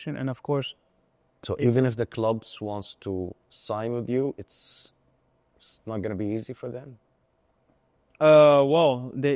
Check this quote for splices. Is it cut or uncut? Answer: uncut